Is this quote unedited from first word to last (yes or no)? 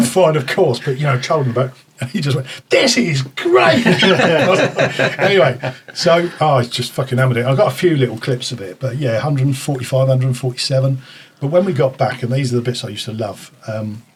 yes